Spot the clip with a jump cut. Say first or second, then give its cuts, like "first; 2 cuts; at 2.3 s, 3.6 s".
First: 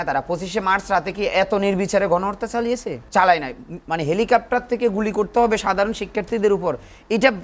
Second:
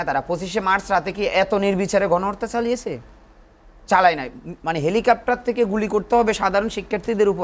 first; 1 cut; at 3.0 s